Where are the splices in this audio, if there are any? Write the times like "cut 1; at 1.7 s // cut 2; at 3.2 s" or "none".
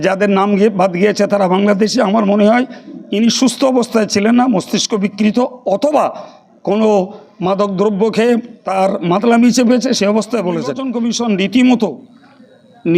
cut 1; at 10.9 s